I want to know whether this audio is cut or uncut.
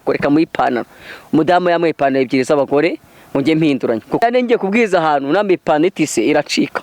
cut